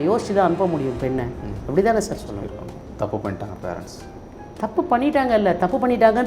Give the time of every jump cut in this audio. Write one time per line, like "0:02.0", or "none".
0:02.8